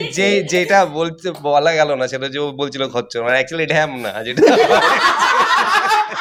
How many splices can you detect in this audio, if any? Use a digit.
0